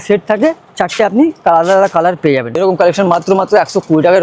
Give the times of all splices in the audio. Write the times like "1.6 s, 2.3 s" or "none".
2.6 s

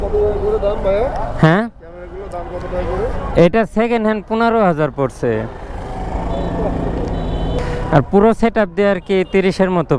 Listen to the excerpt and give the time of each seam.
7.6 s

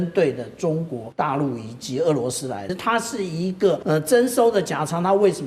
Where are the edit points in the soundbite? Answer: 1.0 s, 2.7 s, 3.8 s

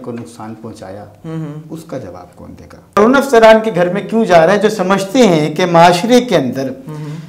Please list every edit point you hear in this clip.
3.0 s

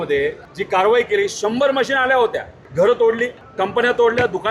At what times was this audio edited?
none

